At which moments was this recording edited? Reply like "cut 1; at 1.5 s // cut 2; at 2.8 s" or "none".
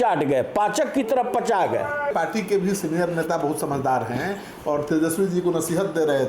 cut 1; at 2.1 s